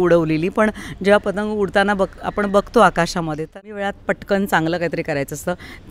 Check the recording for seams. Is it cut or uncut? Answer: cut